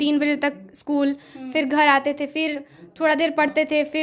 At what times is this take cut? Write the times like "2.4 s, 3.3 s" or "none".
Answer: none

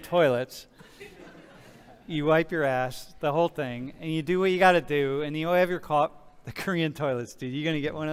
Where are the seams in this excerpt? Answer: none

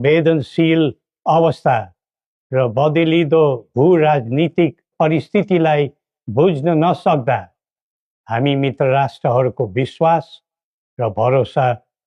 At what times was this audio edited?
none

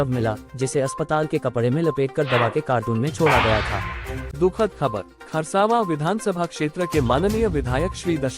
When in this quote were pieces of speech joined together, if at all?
4.3 s

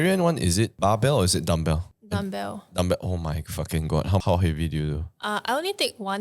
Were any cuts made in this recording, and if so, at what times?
0.7 s, 1.9 s, 4.2 s

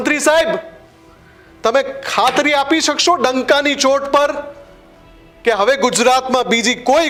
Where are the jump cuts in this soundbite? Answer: none

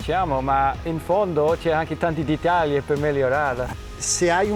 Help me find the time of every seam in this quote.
0.9 s, 3.7 s

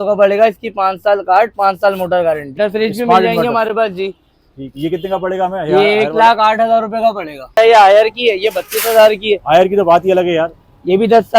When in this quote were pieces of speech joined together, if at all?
2.5 s, 7.6 s

